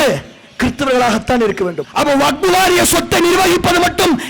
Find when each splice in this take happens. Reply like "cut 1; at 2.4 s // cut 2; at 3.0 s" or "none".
cut 1; at 1.8 s